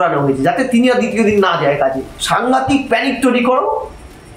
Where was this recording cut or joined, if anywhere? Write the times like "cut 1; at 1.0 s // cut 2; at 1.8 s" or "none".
cut 1; at 2.1 s